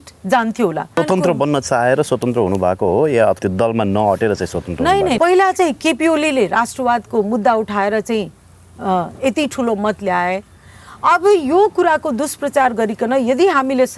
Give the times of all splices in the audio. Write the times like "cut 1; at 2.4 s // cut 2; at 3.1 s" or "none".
cut 1; at 1.0 s // cut 2; at 3.4 s // cut 3; at 5.2 s